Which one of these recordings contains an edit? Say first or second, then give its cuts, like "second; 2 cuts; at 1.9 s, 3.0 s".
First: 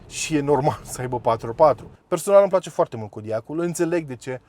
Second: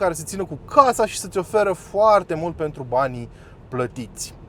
first; 1 cut; at 1.9 s